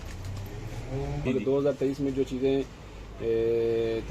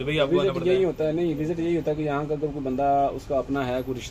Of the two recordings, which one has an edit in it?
first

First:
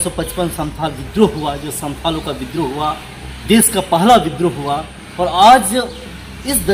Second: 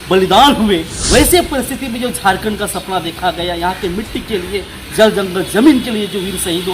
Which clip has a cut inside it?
second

